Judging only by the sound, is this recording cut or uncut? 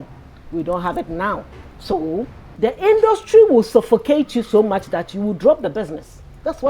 cut